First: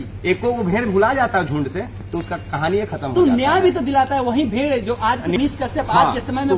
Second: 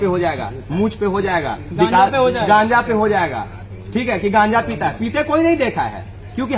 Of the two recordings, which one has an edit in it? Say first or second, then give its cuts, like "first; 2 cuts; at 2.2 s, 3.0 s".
first; 1 cut; at 5.4 s